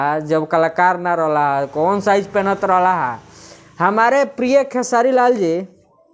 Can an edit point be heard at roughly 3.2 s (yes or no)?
no